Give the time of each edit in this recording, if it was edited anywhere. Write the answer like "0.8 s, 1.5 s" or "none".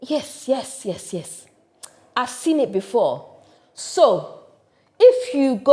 none